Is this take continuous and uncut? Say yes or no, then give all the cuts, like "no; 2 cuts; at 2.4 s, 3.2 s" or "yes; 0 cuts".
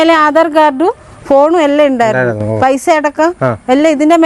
yes; 0 cuts